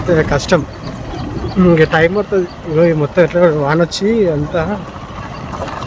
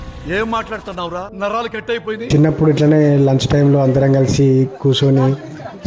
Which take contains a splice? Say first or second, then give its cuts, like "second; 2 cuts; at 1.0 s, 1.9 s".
second; 1 cut; at 2.2 s